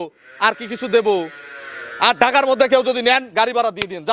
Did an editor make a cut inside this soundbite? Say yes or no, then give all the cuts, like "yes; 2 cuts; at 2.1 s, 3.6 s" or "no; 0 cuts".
no; 0 cuts